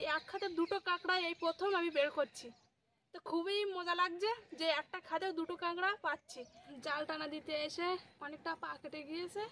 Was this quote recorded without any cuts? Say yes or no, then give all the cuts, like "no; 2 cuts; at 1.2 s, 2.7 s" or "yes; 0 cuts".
no; 2 cuts; at 6.7 s, 8.2 s